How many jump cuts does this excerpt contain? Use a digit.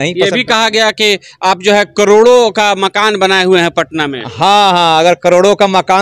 0